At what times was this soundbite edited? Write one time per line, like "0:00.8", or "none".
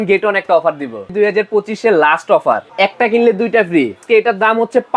0:01.1
0:02.7
0:04.0